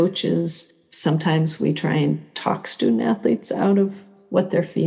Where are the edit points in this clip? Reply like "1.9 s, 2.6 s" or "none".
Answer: none